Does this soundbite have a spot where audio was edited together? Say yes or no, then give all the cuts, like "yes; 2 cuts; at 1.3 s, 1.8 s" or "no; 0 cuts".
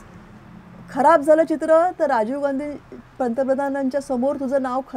no; 0 cuts